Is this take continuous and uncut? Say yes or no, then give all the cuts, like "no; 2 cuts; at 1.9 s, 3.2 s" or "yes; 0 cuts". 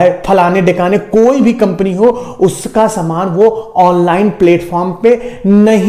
yes; 0 cuts